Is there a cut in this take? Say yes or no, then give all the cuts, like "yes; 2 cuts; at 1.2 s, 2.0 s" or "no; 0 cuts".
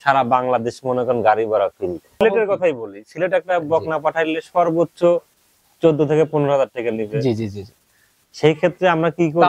yes; 1 cut; at 2.2 s